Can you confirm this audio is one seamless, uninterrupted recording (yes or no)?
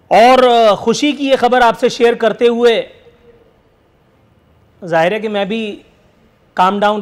yes